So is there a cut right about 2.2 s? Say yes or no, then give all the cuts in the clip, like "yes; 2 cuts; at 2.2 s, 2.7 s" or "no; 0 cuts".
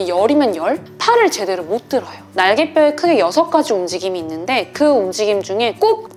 no; 0 cuts